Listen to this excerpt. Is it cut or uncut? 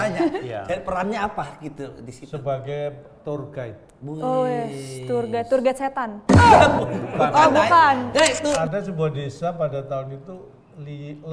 cut